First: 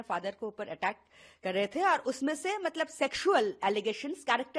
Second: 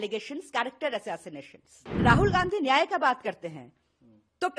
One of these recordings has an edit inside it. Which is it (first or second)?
second